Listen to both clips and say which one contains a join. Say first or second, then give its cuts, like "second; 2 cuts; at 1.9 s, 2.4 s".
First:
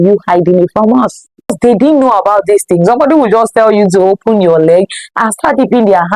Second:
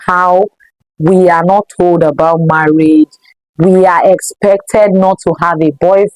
first; 1 cut; at 1.5 s